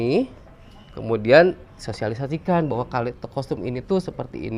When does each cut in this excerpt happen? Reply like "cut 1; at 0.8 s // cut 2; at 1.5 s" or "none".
none